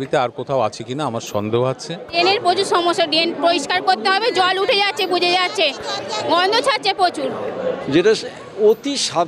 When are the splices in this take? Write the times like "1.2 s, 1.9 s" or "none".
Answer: 2.1 s, 7.8 s